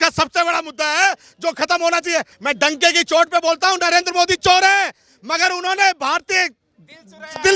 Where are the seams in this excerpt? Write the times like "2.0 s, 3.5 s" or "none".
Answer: 2.3 s